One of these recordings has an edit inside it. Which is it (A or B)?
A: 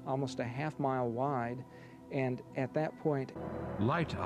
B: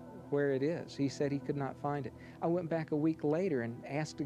A